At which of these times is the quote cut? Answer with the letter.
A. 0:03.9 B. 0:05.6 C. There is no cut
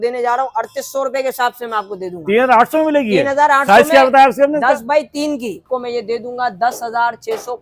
B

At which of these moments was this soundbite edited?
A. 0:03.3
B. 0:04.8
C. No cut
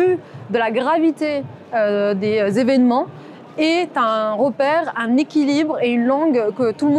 C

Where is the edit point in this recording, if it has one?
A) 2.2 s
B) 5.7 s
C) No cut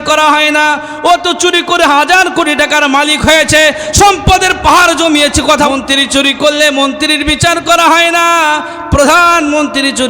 B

